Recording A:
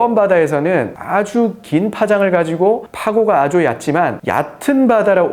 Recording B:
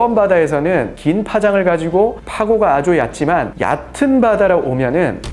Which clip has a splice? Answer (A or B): B